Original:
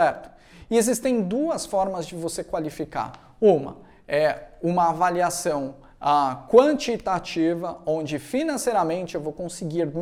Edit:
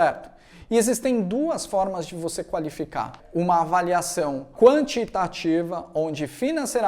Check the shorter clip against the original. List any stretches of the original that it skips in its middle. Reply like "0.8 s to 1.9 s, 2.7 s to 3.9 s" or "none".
3.2 s to 4.5 s, 5.8 s to 6.4 s

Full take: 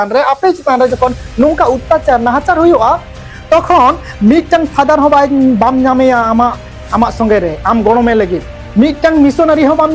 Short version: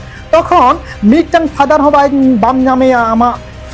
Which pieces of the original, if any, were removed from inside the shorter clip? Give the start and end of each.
none

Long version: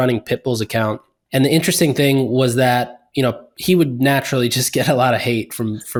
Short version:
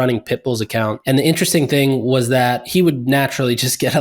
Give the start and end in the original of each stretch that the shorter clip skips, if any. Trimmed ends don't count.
1.0 s to 1.2 s, 2.9 s to 3.6 s

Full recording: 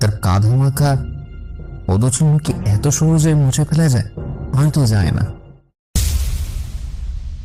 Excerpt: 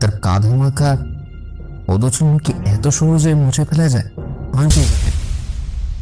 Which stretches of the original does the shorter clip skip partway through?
4.9 s to 6.1 s

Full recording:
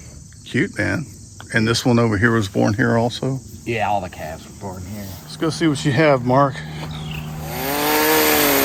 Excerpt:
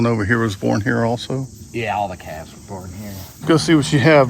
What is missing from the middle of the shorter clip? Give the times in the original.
none

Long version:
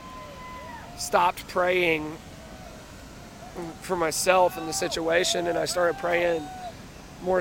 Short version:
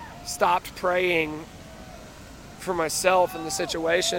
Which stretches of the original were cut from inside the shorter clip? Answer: 3.3 s to 3.8 s

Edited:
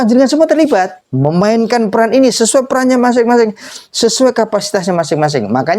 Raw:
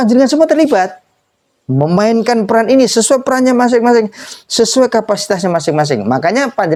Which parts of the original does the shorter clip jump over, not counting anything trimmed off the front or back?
1.0 s to 1.6 s

